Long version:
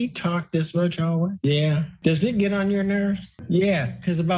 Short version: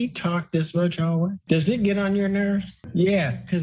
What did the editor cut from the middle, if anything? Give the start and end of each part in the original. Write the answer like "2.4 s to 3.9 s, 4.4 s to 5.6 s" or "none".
1.4 s to 1.9 s